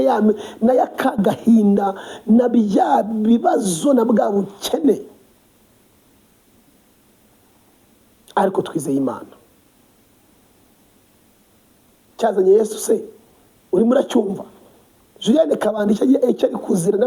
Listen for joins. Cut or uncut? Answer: uncut